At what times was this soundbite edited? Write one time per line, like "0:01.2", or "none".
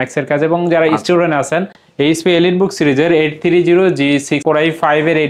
0:01.8
0:04.4